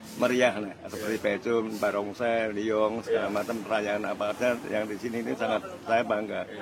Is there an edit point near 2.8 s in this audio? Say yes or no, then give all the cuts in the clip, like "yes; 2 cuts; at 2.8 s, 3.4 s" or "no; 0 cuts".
no; 0 cuts